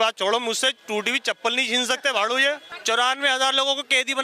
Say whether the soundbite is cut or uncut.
cut